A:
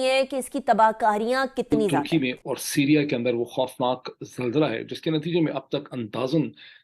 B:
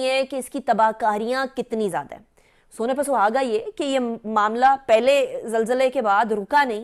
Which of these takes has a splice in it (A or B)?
A